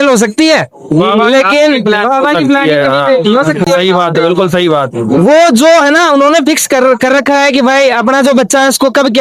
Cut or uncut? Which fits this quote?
uncut